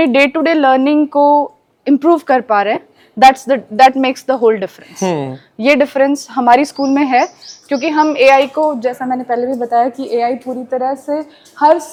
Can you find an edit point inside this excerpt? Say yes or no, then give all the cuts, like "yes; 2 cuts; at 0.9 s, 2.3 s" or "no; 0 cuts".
no; 0 cuts